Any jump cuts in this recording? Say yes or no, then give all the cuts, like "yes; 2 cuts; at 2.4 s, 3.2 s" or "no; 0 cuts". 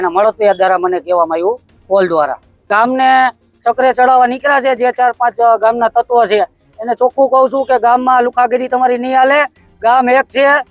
yes; 1 cut; at 2.7 s